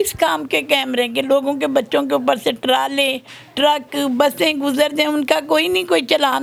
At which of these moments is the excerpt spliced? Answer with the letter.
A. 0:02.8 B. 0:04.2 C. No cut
C